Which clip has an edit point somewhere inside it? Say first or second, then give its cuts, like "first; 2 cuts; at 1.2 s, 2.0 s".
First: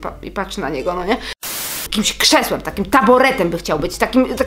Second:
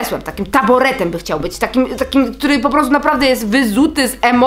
first; 1 cut; at 1.4 s